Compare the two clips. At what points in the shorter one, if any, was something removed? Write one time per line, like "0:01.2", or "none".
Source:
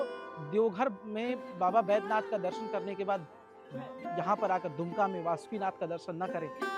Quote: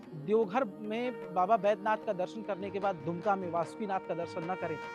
0:03.0